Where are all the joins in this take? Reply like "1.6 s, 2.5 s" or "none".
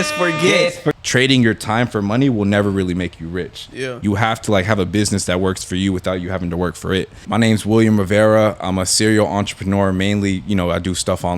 0.9 s, 7.2 s